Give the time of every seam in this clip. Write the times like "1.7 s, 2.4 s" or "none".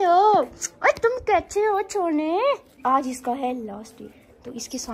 2.7 s